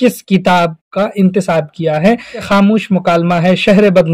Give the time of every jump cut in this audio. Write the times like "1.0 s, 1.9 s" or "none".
2.5 s